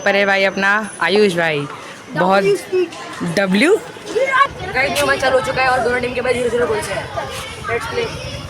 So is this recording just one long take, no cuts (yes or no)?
no